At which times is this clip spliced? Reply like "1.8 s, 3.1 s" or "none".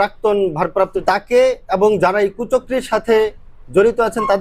1.0 s

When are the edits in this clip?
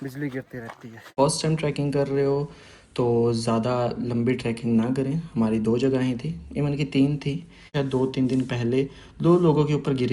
1.1 s, 7.7 s

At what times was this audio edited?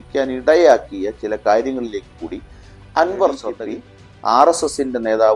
3.5 s

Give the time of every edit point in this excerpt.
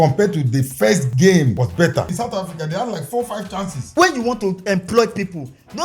1.1 s, 2.1 s, 3.9 s

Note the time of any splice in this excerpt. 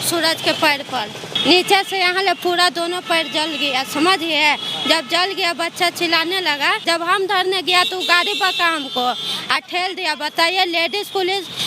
1.4 s, 6.8 s

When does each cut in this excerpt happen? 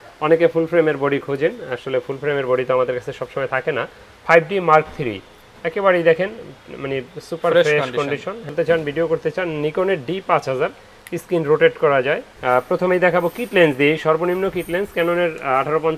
8.5 s, 12.3 s

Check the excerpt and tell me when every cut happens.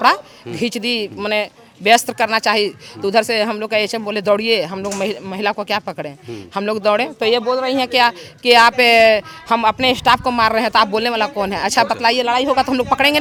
none

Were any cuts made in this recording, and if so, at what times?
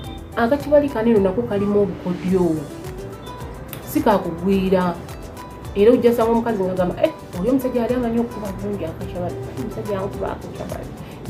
none

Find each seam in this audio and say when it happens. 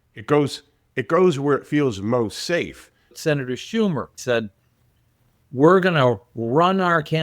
3.1 s, 4.2 s

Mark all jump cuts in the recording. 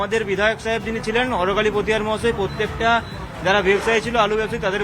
none

